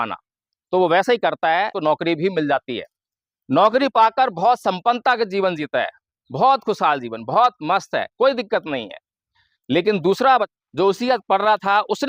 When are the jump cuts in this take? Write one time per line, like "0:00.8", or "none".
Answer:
0:01.7
0:10.5